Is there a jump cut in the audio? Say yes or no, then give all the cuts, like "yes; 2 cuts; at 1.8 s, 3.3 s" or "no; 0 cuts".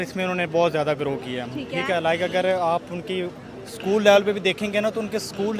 no; 0 cuts